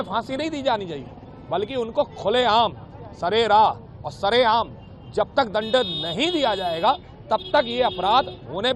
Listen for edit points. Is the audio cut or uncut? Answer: uncut